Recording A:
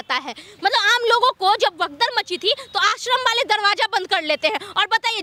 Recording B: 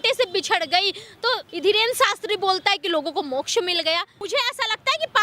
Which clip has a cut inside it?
B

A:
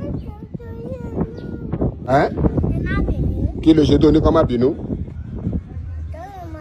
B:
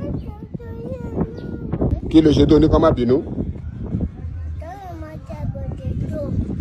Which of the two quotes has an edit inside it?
B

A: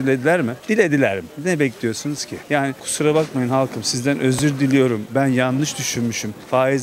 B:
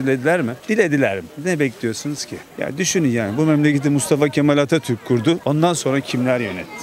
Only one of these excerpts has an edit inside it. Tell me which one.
B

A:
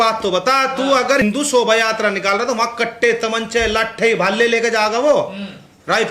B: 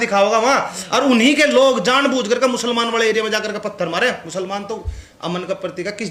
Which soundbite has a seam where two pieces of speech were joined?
A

